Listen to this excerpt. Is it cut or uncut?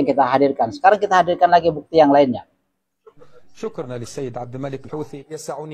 uncut